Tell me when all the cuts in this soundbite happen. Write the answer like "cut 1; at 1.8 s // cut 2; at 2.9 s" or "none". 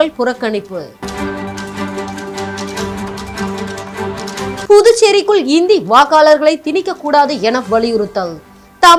none